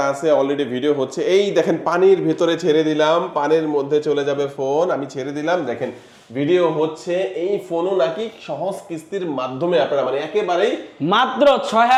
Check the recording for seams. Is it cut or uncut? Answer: uncut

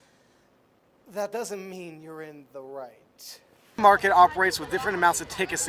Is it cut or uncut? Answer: cut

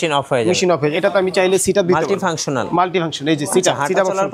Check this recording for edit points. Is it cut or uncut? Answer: cut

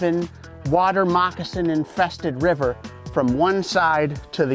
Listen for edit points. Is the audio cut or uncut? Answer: uncut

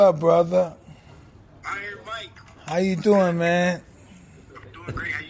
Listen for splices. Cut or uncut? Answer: uncut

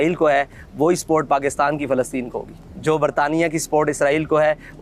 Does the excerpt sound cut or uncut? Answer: uncut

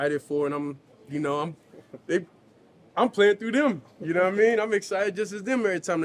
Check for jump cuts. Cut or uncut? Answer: uncut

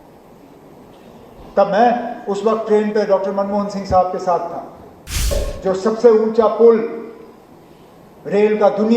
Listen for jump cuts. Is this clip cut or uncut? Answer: cut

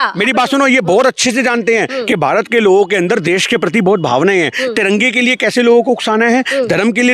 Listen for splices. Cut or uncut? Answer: uncut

